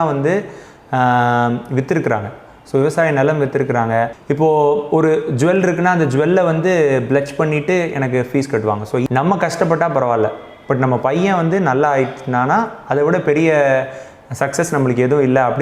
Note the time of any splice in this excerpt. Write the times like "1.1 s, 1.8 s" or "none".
4.2 s, 9.1 s